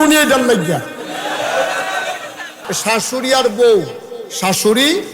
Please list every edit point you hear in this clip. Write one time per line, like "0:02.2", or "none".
0:02.6

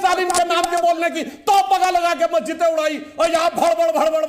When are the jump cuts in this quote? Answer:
none

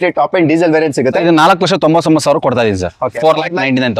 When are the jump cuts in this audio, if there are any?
0:01.2

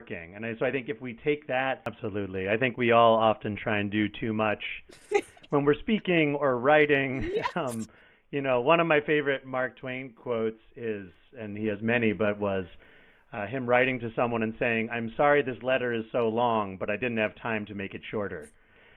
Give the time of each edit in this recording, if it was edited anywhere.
0:02.0

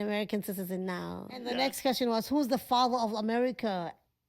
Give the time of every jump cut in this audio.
0:01.3

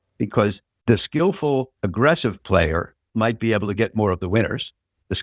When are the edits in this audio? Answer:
0:01.2
0:03.0

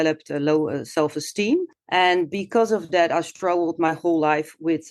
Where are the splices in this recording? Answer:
0:01.8

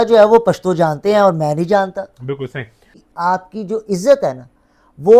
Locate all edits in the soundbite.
0:03.0

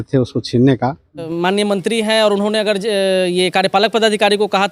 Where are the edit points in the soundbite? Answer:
0:01.3

